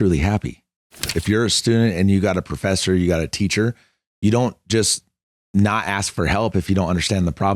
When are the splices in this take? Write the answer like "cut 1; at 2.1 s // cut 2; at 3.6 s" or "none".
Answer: cut 1; at 1.0 s

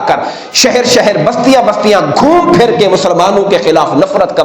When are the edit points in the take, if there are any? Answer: none

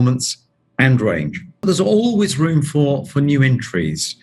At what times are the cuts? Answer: cut 1; at 1.6 s

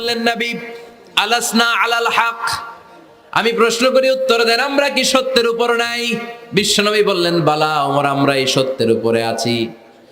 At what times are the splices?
none

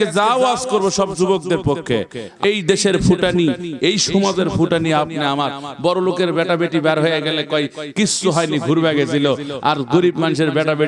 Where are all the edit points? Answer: cut 1; at 2.4 s

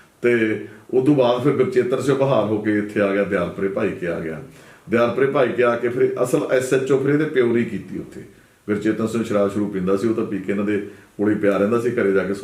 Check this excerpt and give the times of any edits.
none

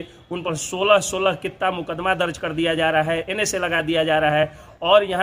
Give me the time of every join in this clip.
none

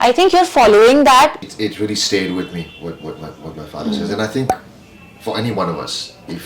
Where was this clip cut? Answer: cut 1; at 1.4 s

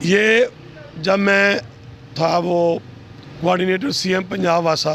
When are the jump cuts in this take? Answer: none

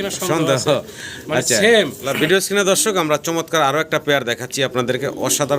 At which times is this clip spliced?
cut 1; at 2.0 s

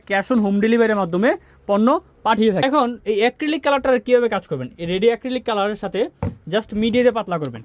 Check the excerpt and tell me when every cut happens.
cut 1; at 2.6 s

